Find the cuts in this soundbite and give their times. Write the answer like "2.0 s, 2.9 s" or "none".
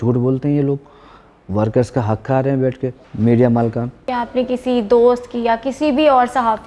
3.0 s, 4.0 s